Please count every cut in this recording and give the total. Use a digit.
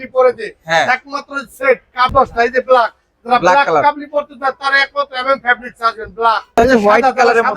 2